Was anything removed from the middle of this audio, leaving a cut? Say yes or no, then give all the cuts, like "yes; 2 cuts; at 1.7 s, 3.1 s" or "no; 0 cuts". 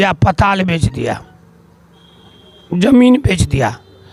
no; 0 cuts